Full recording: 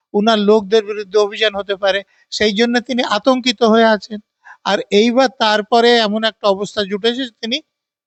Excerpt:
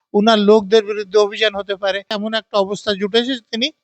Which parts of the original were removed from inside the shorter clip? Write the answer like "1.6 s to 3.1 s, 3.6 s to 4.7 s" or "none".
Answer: 2.2 s to 6.1 s